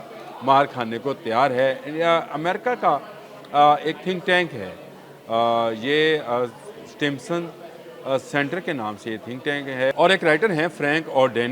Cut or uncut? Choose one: uncut